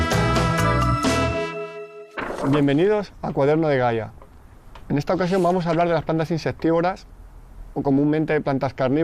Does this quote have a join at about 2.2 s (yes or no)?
yes